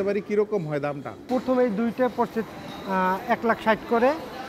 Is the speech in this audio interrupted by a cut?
yes; 1 cut; at 1.2 s

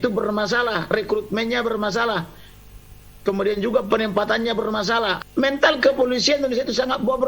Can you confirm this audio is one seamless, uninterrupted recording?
no; 1 cut; at 5.2 s

